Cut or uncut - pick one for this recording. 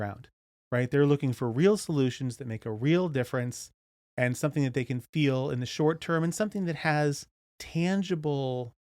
cut